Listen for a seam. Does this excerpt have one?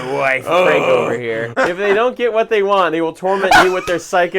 yes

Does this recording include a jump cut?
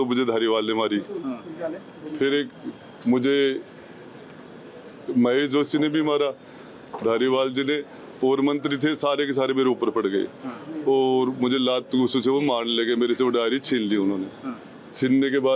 no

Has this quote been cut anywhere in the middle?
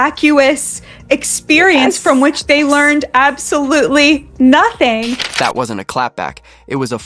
yes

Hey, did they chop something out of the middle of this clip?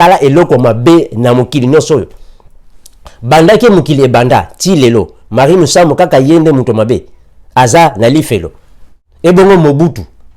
yes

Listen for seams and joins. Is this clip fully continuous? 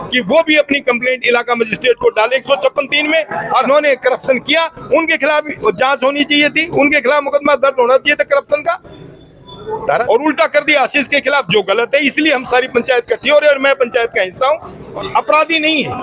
no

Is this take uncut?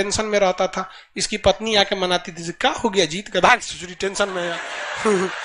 yes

